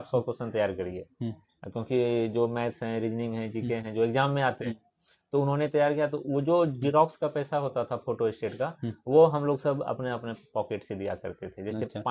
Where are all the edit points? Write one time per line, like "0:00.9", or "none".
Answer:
none